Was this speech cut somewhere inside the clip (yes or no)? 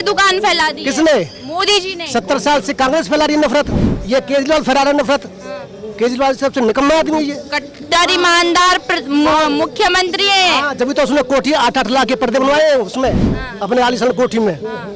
no